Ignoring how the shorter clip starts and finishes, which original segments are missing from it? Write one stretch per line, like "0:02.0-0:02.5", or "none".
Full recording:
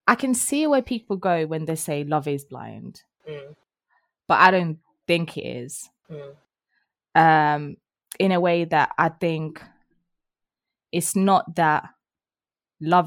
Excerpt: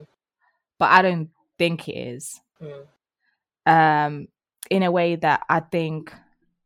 none